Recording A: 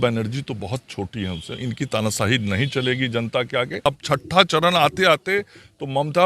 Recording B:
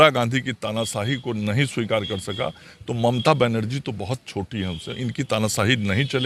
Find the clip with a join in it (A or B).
A